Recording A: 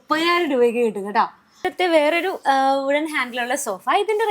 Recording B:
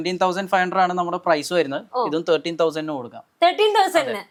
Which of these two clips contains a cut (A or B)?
A